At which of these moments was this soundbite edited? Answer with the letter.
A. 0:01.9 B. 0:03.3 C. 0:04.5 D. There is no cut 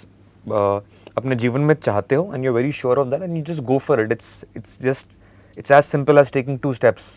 D